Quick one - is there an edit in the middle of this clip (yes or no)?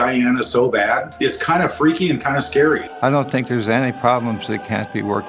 yes